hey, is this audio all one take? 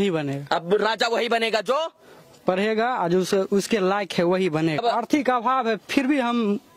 no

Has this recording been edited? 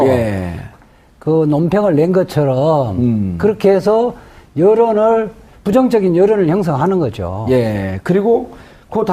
no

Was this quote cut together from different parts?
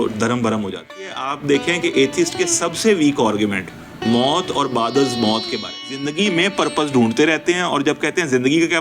yes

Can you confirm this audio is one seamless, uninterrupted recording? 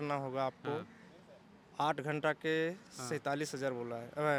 yes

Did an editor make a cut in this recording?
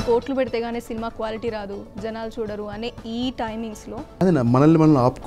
yes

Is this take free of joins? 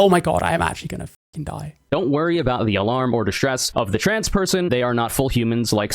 no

